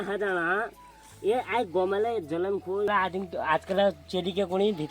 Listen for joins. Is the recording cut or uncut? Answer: cut